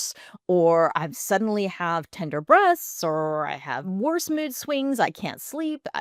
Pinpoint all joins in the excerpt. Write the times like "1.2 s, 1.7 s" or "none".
3.8 s